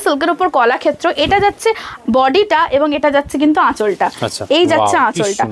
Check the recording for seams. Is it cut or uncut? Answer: uncut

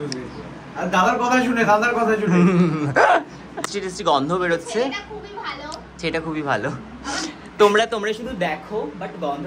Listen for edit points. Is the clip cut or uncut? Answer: cut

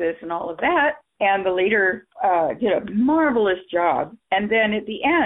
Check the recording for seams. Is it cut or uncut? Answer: uncut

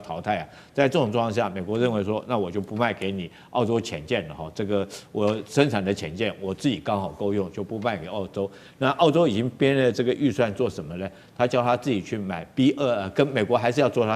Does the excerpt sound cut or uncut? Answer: uncut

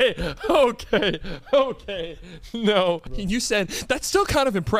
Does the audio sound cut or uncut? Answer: cut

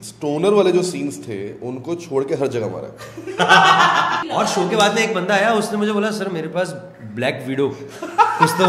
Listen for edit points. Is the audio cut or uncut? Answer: cut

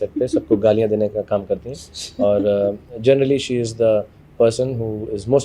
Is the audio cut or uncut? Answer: uncut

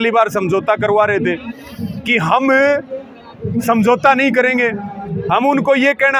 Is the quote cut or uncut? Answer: uncut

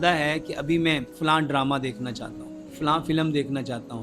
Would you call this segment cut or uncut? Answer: cut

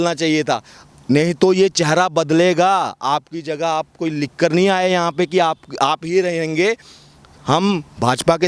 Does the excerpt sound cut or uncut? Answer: uncut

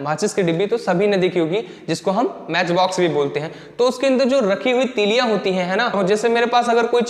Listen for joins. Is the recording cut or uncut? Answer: cut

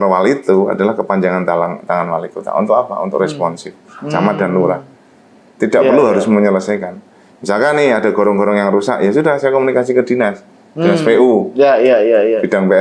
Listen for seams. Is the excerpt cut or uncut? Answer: uncut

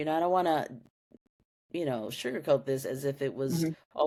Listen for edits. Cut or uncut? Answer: uncut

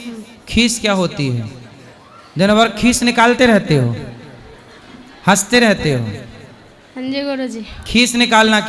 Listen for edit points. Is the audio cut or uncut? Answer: uncut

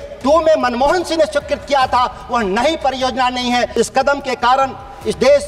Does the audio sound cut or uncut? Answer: cut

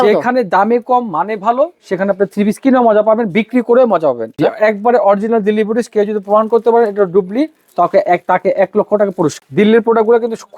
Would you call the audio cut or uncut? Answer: cut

